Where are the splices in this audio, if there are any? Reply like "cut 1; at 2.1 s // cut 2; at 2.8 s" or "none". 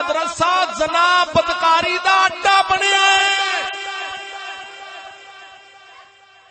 none

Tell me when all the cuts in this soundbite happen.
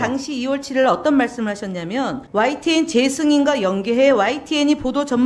cut 1; at 2.2 s

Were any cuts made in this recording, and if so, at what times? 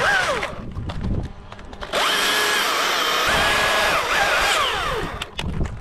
cut 1; at 3.3 s

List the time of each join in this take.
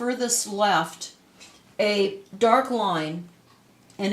cut 1; at 3.0 s

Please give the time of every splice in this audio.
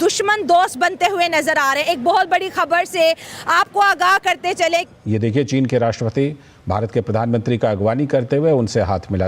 cut 1; at 4.9 s

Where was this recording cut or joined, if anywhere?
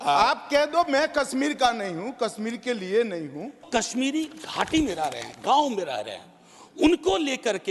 cut 1; at 3.7 s

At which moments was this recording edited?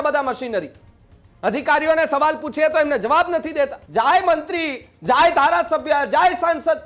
cut 1; at 3.8 s

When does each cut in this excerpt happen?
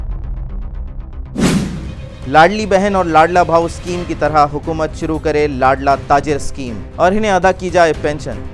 cut 1; at 1.6 s

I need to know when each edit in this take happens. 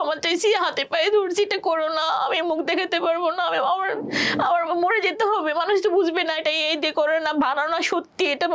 none

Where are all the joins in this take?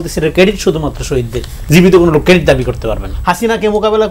cut 1; at 3.1 s

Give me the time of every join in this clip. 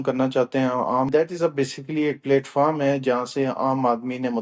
cut 1; at 1.1 s

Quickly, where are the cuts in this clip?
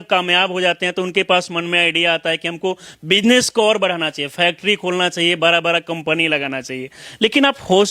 none

